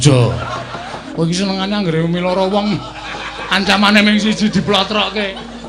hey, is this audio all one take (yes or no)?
no